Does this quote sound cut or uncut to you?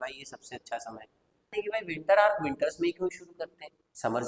cut